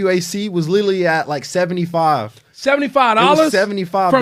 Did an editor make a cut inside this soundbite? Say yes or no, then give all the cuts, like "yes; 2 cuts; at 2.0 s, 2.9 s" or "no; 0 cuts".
no; 0 cuts